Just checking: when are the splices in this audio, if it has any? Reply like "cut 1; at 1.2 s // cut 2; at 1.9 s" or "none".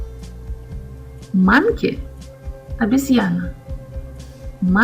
cut 1; at 1.3 s